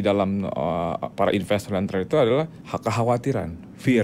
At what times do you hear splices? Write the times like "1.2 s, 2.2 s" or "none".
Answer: 2.6 s